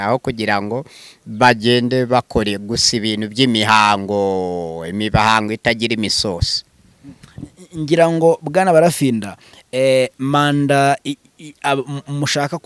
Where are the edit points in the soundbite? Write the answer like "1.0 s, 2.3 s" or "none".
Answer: none